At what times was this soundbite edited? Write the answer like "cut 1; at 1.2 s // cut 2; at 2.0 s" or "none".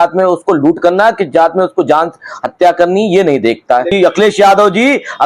cut 1; at 3.9 s